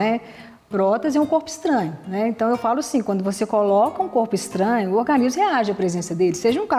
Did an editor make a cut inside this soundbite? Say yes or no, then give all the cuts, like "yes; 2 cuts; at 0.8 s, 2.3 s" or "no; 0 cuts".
no; 0 cuts